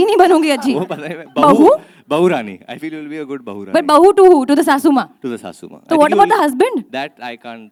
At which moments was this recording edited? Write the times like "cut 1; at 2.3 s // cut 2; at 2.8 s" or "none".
none